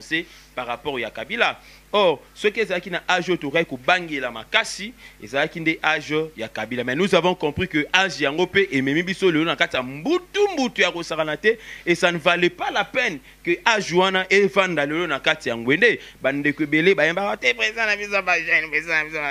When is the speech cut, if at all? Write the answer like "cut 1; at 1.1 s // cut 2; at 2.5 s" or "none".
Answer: none